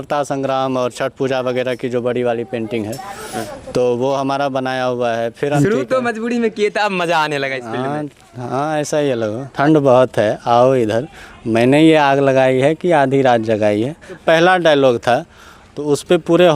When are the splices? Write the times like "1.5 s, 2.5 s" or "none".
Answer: 5.6 s, 9.4 s, 14.1 s